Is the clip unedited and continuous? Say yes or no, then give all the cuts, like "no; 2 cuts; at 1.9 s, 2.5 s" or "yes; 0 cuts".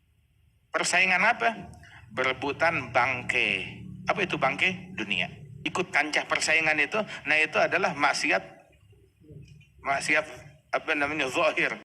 no; 1 cut; at 5.5 s